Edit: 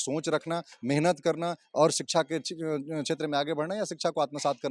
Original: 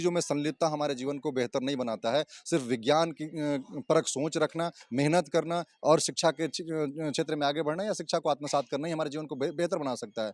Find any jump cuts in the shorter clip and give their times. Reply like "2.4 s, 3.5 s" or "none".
none

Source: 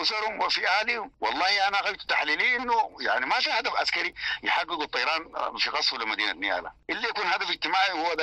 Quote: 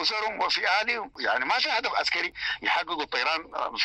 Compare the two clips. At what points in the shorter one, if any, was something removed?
1.1 s

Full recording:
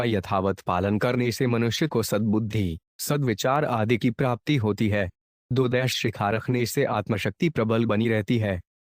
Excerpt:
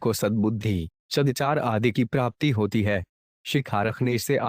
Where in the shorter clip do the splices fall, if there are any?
1.3 s, 3.4 s

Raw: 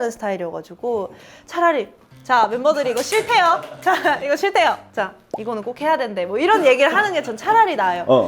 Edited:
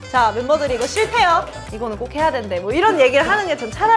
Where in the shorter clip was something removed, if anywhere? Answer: 1.6 s

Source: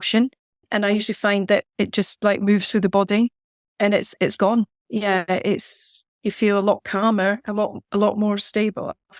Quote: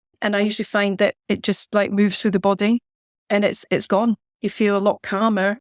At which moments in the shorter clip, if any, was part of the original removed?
4.3 s

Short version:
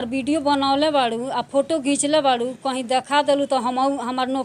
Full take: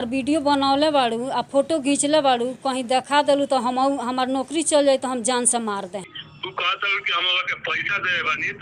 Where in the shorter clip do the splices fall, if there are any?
none

